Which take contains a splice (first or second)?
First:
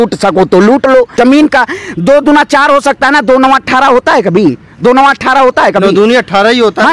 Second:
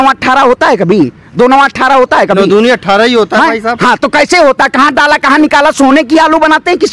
first